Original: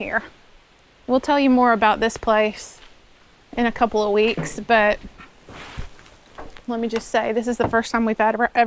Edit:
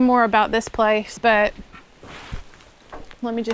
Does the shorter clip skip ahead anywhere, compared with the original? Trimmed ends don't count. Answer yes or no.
yes